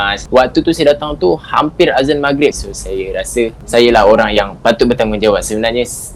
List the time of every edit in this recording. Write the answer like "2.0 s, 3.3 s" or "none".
3.6 s